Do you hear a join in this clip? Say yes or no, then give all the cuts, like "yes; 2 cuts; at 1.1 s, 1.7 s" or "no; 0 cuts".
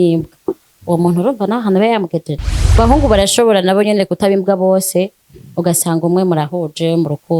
yes; 1 cut; at 2.8 s